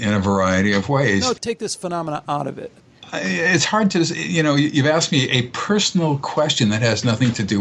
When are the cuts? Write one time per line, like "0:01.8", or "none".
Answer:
0:01.4
0:03.0